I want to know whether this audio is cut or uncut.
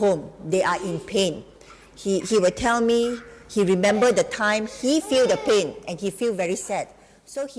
uncut